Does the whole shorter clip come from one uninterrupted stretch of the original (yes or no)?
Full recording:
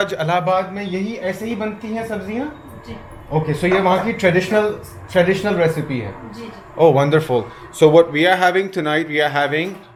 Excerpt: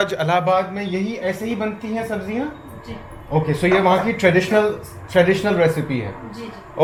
yes